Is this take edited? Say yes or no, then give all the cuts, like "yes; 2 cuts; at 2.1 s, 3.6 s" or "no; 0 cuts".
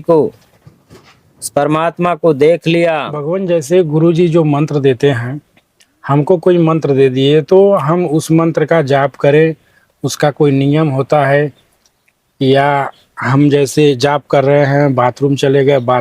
yes; 1 cut; at 3.2 s